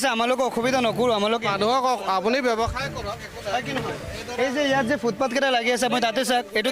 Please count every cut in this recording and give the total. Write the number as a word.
zero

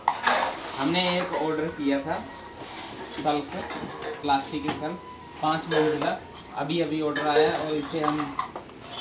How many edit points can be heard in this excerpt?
zero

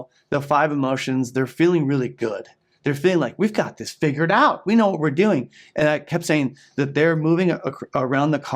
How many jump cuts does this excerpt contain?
zero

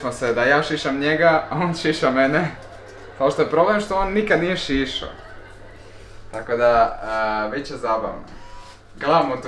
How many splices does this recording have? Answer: zero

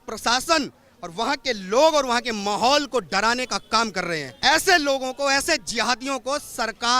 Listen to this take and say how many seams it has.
one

